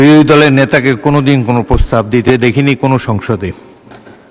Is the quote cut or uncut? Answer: uncut